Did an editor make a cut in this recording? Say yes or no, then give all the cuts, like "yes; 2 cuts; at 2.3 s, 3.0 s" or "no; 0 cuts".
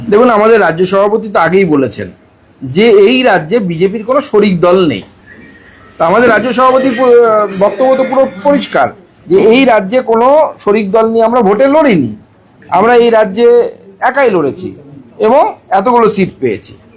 no; 0 cuts